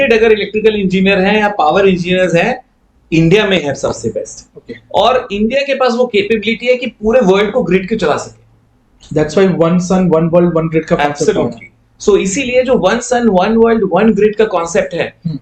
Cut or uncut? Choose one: uncut